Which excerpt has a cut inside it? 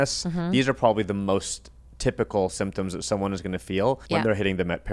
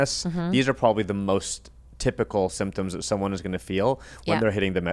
first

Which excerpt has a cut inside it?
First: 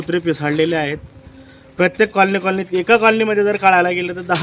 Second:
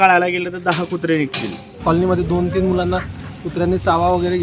second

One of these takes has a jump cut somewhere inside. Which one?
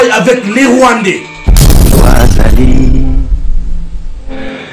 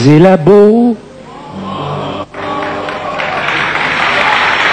first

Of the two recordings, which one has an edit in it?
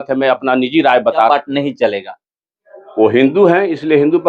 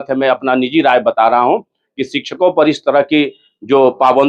first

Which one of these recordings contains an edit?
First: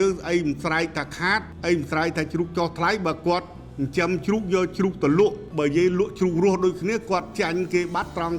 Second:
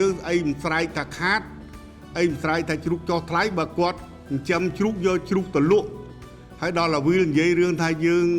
first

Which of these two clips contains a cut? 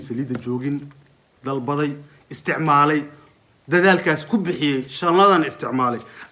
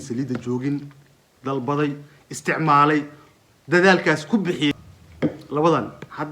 second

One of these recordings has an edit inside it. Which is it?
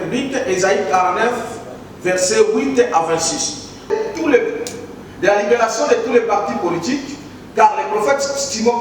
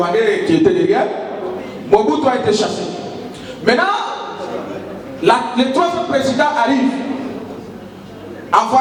first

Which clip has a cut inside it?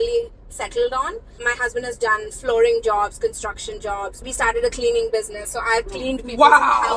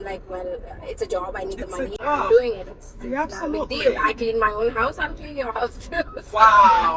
first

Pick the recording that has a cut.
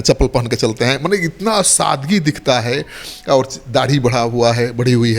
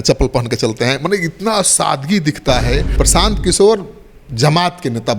second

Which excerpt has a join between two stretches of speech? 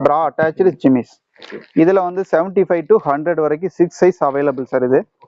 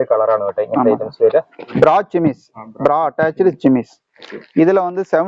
second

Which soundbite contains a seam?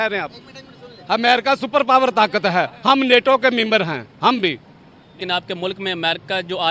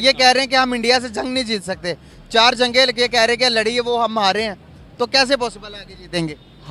first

